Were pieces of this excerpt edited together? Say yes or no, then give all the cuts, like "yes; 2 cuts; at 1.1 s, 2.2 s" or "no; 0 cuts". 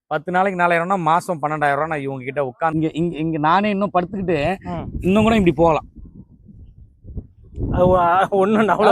yes; 1 cut; at 2.7 s